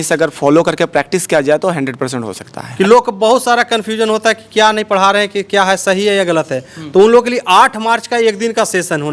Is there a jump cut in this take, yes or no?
no